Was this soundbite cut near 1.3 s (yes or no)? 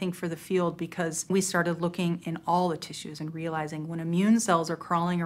yes